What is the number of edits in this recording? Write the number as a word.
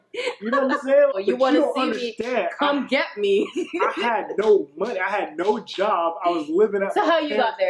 one